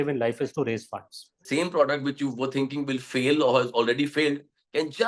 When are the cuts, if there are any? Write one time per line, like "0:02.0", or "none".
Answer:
0:01.4